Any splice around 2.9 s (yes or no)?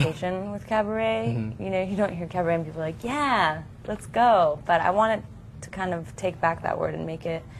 yes